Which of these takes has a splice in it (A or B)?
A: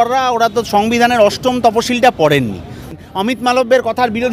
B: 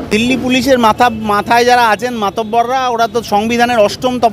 A